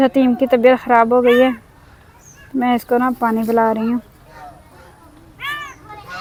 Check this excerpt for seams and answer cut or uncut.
uncut